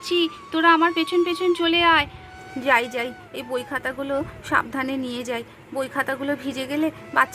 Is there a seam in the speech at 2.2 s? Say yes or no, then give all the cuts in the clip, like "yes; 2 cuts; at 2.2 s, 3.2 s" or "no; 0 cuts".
yes; 1 cut; at 2.2 s